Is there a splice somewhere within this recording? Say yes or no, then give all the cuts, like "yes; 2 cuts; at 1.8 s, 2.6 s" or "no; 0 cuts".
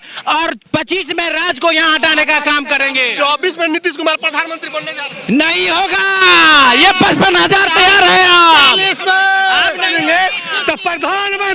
no; 0 cuts